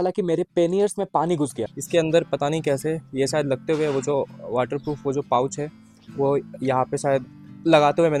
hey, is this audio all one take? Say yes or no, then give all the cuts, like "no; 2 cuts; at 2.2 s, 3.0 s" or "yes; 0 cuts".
yes; 0 cuts